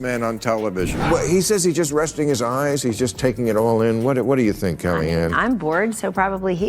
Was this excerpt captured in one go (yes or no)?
no